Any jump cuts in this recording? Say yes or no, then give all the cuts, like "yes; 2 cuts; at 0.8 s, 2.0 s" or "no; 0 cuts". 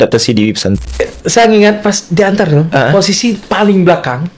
yes; 1 cut; at 1.0 s